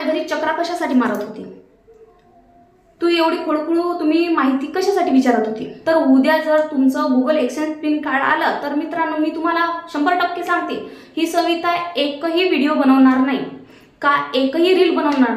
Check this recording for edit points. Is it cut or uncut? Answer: cut